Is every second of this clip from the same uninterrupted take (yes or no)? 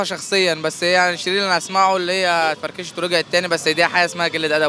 yes